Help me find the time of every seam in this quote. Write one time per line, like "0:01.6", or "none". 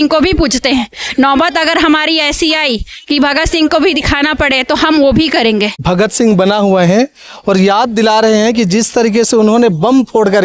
0:05.7